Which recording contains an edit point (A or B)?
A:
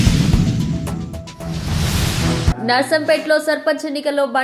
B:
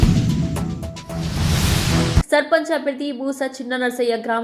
B